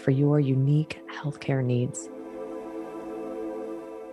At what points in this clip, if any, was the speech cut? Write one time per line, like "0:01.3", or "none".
0:02.0